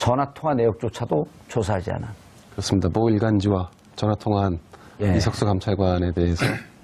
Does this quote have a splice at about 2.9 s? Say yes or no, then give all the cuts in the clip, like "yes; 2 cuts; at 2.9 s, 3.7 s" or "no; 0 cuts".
yes; 1 cut; at 2.9 s